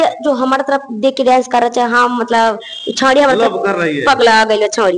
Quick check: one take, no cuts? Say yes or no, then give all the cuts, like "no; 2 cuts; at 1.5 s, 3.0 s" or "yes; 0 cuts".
yes; 0 cuts